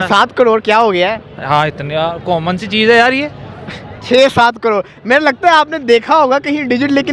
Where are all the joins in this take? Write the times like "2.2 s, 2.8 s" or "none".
none